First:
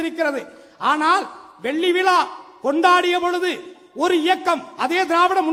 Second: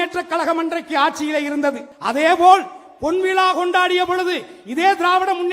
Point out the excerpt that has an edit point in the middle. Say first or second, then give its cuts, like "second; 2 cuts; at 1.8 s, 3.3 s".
second; 1 cut; at 1.9 s